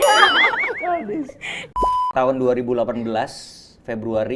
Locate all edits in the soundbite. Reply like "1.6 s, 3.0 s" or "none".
1.7 s

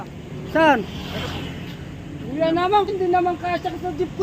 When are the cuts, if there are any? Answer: 2.9 s

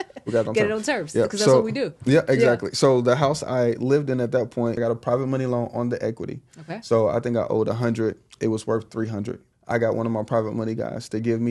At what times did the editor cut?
4.8 s, 9.5 s

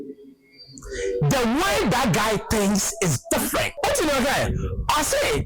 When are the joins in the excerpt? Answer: 3.7 s

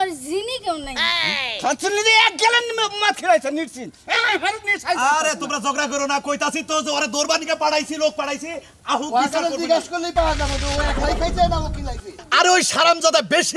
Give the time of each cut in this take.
none

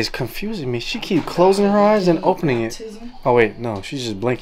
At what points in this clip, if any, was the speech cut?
none

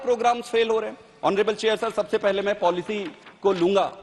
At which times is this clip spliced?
none

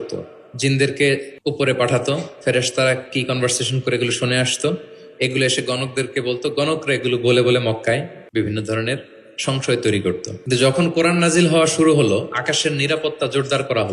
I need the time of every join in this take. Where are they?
1.3 s, 8.2 s, 10.3 s

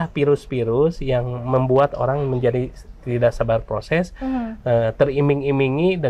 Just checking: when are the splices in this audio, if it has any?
none

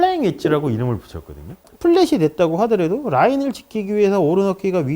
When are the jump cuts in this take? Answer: 1.7 s

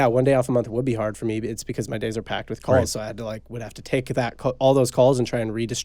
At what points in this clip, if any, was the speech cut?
none

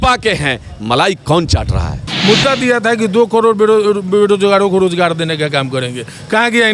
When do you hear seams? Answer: 2.1 s

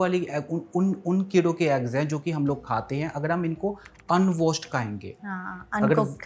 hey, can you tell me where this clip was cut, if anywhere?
none

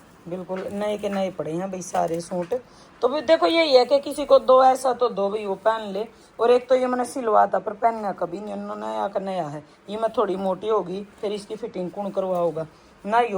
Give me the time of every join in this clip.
none

